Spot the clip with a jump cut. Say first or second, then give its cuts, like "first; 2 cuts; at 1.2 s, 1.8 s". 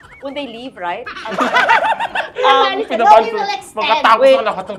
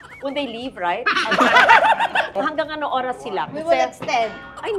second; 1 cut; at 2.3 s